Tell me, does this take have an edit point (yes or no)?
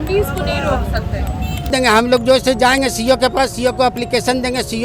yes